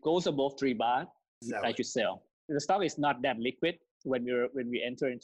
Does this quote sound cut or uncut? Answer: cut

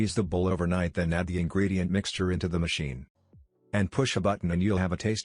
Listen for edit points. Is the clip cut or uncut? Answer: cut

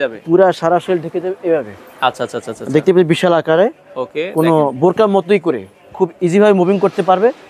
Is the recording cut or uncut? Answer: uncut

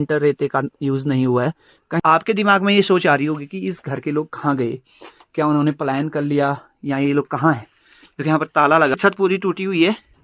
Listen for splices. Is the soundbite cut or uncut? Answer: cut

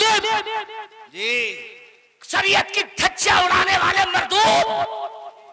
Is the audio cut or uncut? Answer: uncut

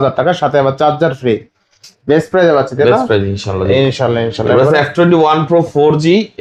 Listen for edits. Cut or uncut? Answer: uncut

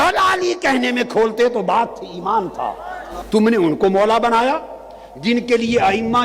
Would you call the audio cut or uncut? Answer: cut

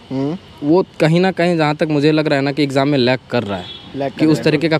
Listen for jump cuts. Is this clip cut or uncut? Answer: uncut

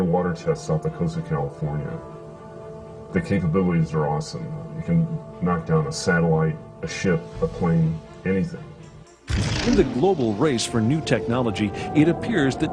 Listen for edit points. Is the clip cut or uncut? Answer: uncut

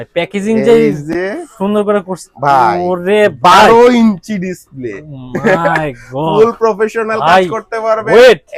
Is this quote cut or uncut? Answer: uncut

